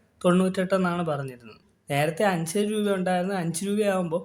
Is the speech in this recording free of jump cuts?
no; 1 cut; at 1.7 s

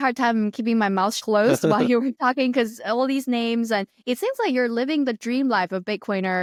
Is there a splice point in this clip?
no; 0 cuts

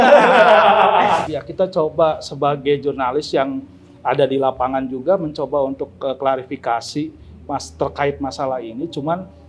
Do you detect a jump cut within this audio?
yes; 1 cut; at 1.2 s

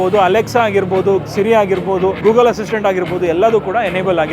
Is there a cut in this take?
yes; 1 cut; at 2.2 s

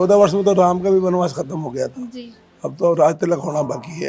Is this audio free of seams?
yes; 0 cuts

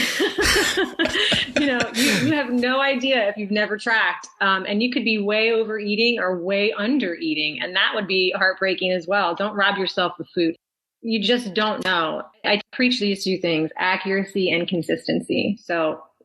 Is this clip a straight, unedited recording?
yes; 0 cuts

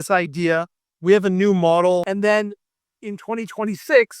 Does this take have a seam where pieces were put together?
yes; 1 cut; at 2.1 s

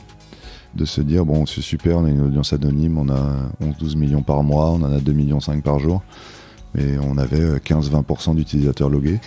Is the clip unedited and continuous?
yes; 0 cuts

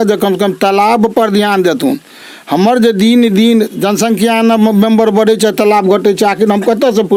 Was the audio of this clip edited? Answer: no; 0 cuts

